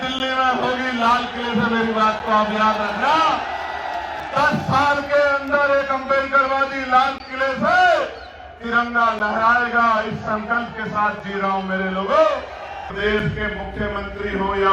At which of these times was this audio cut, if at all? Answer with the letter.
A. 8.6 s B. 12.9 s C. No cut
B